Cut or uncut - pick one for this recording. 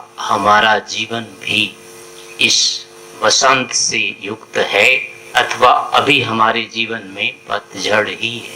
cut